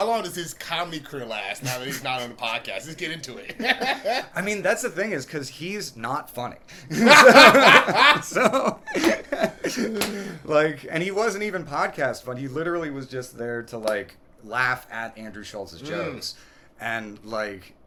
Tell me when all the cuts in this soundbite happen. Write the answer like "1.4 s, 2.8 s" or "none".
none